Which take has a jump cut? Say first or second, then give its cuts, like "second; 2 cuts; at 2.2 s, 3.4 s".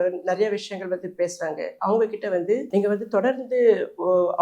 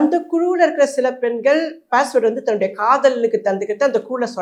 first; 1 cut; at 2.7 s